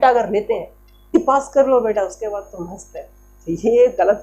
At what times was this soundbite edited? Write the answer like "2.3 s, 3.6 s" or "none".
1.2 s